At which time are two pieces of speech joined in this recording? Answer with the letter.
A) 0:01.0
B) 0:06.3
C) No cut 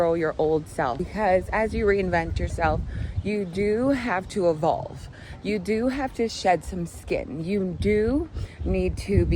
A